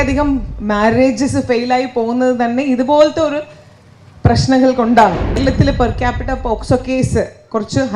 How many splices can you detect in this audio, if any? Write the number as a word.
one